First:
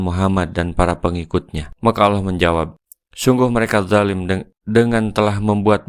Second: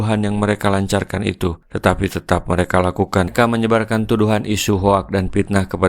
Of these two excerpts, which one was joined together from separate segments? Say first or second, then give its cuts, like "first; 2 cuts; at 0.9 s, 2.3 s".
second; 1 cut; at 3.3 s